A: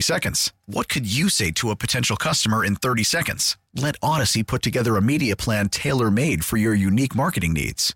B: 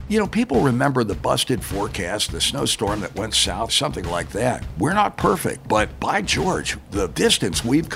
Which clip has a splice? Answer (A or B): B